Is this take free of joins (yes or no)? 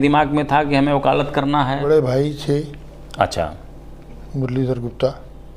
no